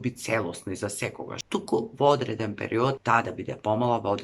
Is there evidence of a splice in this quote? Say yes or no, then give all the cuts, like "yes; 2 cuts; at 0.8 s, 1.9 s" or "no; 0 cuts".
yes; 2 cuts; at 1.3 s, 3.0 s